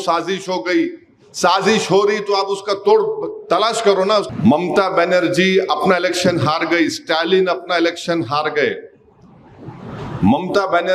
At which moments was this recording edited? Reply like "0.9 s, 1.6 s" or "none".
4.3 s